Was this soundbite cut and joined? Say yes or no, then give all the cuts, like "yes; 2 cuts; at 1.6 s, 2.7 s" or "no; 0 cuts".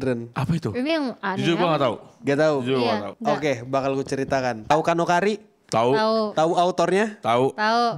yes; 2 cuts; at 3.1 s, 4.6 s